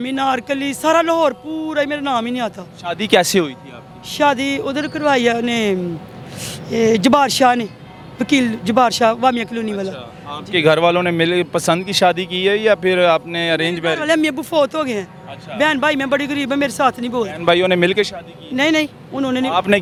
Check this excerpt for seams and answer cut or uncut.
uncut